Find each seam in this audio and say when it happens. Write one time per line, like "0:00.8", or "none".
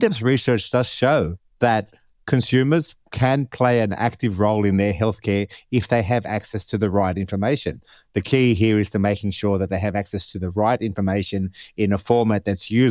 0:01.4